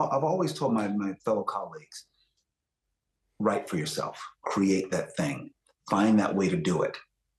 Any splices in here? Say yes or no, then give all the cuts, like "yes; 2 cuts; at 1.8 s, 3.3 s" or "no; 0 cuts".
no; 0 cuts